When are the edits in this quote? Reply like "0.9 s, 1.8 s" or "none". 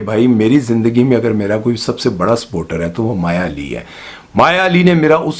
none